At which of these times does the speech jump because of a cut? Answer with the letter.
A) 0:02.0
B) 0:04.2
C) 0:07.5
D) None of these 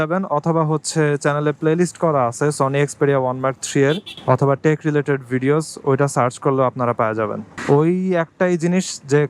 C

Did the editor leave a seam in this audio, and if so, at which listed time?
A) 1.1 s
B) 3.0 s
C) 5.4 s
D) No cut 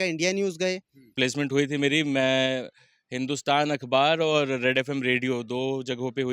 D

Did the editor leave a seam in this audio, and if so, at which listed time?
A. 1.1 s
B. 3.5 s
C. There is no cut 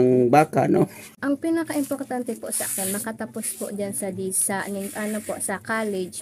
A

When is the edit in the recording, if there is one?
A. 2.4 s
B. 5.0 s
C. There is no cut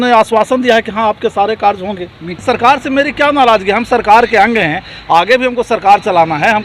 A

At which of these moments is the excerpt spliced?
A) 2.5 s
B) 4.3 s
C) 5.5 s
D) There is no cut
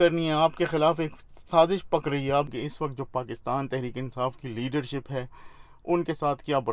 A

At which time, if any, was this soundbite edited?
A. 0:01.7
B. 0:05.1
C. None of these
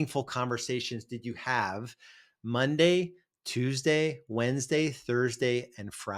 C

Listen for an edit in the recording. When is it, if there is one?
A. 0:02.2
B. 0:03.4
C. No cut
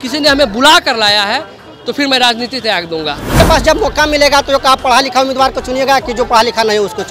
B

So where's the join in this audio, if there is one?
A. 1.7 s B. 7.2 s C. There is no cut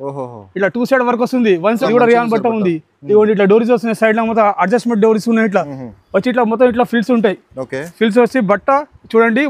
A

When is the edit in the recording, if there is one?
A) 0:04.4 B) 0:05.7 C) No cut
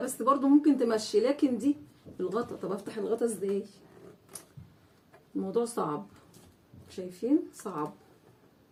C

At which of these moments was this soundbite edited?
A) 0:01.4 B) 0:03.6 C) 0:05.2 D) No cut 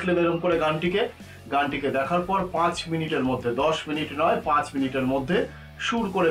D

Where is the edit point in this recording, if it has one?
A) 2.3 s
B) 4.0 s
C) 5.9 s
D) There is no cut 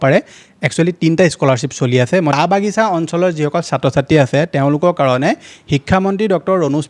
A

